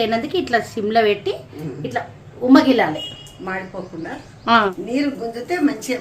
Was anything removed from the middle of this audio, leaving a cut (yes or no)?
yes